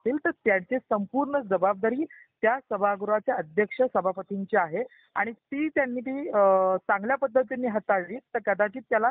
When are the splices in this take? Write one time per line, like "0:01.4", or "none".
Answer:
none

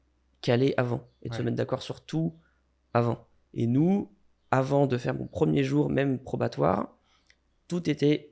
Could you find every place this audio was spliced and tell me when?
none

